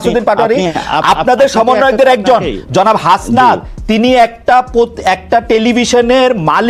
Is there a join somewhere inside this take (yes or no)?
no